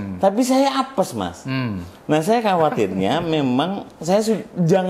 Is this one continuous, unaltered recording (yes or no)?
yes